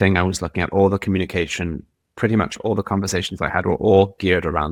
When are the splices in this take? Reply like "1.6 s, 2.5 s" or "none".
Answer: none